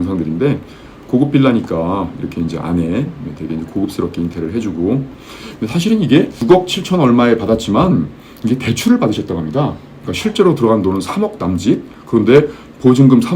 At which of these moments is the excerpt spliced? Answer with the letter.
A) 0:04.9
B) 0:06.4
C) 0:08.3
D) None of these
B